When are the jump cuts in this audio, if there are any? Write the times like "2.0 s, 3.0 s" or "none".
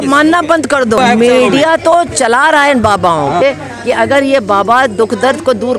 1.0 s, 3.4 s